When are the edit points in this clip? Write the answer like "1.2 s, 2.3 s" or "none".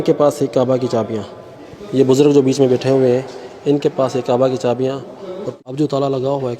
5.4 s